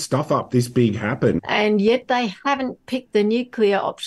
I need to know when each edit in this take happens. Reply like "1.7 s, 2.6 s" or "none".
1.4 s